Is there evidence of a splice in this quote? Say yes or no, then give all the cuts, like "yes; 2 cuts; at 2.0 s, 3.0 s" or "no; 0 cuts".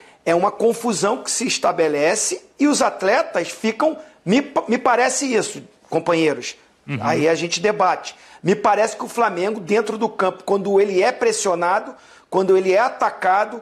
no; 0 cuts